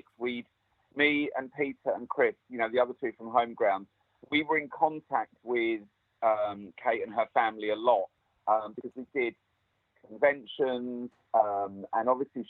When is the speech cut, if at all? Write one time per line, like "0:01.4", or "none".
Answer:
0:08.2